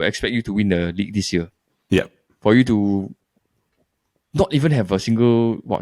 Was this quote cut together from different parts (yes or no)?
no